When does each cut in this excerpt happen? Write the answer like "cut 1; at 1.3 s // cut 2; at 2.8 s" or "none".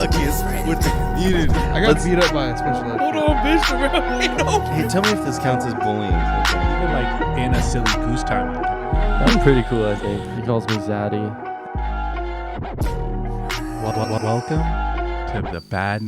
none